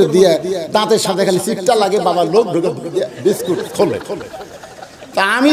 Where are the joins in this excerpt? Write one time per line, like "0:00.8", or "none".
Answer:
none